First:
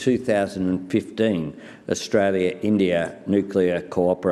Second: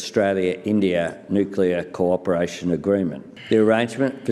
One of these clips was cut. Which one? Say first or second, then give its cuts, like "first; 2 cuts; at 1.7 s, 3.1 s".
second; 1 cut; at 3.3 s